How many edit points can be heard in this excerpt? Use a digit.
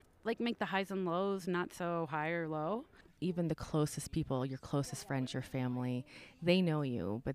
1